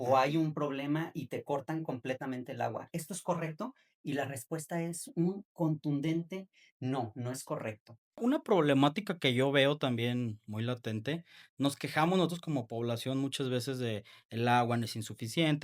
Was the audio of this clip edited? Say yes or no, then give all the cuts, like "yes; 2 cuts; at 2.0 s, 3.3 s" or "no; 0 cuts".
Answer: yes; 1 cut; at 8.2 s